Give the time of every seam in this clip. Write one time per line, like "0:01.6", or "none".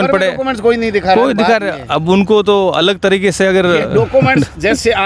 none